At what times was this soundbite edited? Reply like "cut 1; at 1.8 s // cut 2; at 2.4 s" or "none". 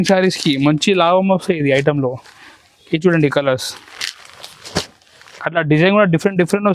none